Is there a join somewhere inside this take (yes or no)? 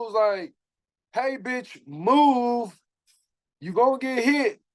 no